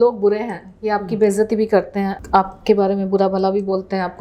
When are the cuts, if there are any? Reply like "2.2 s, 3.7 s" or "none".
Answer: 2.2 s